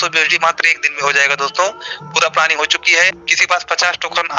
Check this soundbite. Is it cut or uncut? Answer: cut